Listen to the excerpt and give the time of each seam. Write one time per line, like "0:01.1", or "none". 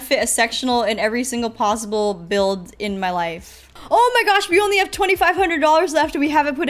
0:03.7